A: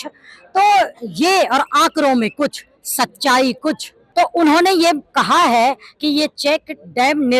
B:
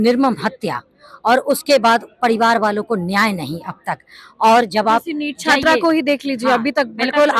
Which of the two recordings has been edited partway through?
A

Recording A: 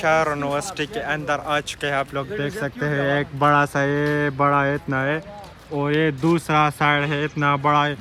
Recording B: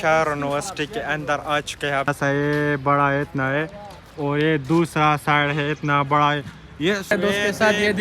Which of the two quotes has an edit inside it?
B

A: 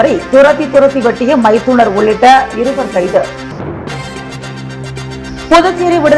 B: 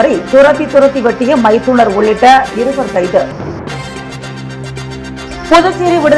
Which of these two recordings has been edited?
A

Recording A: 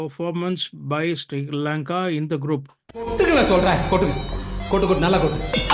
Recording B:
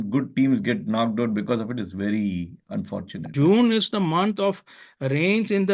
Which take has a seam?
B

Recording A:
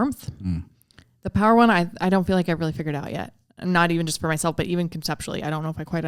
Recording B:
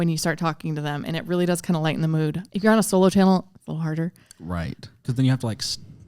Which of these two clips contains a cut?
B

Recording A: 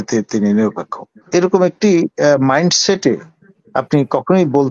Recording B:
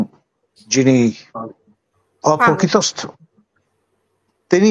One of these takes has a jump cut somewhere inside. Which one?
A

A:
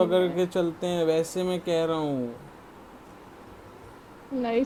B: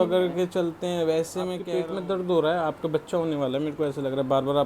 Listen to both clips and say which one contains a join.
B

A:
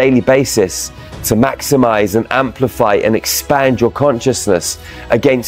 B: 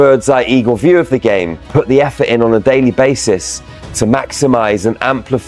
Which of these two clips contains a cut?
B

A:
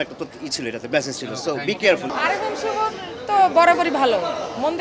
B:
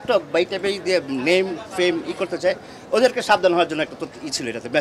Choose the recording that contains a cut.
A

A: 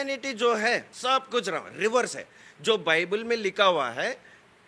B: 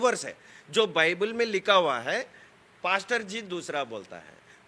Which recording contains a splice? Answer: A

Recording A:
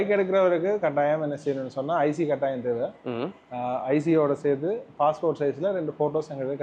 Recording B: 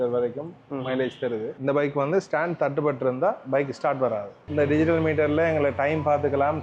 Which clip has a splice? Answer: B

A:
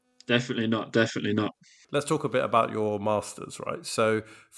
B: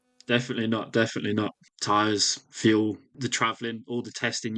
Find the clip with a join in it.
B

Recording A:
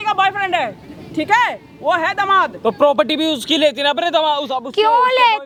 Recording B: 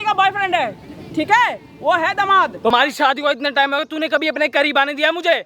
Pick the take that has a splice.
B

